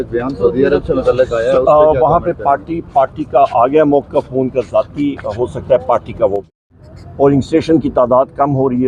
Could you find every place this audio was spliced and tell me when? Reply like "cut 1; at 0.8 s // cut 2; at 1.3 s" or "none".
cut 1; at 6.4 s